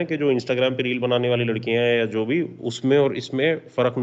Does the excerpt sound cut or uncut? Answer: uncut